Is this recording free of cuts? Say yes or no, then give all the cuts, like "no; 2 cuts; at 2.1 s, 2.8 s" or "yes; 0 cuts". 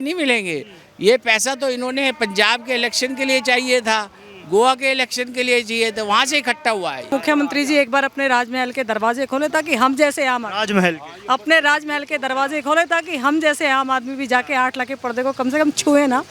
no; 1 cut; at 7.1 s